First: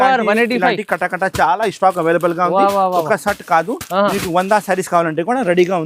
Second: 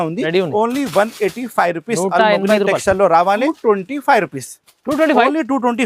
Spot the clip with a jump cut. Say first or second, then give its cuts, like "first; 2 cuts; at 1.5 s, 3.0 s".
second; 1 cut; at 3.5 s